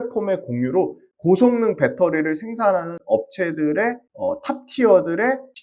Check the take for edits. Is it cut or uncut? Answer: uncut